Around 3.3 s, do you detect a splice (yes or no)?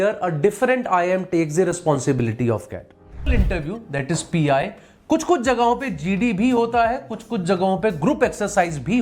yes